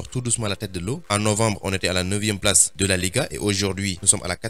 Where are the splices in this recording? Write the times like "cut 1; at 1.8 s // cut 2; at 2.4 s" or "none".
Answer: none